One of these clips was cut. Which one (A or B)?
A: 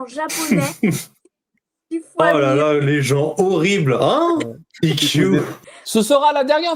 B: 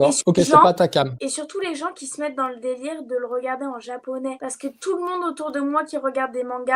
A